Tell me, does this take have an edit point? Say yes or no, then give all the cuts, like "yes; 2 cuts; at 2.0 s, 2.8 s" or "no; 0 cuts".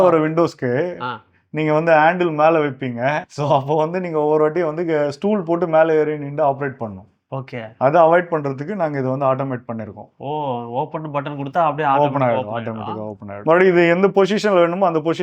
yes; 1 cut; at 3.3 s